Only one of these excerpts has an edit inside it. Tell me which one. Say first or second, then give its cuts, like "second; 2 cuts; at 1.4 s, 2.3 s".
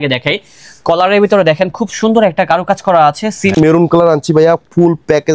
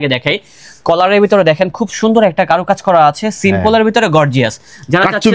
first; 1 cut; at 3.6 s